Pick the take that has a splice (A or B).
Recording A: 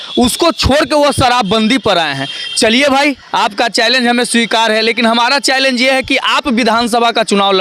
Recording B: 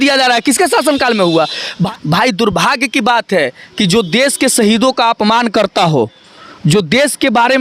B